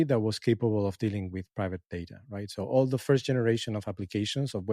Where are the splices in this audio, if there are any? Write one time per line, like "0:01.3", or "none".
none